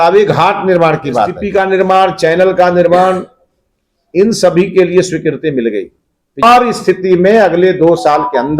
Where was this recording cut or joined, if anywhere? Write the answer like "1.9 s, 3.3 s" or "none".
1.4 s, 6.4 s